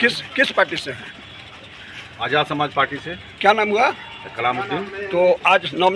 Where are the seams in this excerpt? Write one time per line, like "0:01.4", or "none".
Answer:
none